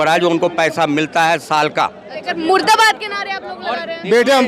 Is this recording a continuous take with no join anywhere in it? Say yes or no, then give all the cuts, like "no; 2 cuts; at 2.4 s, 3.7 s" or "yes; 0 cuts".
no; 1 cut; at 2.2 s